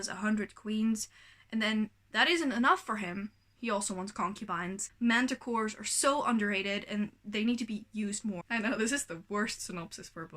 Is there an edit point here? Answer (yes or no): yes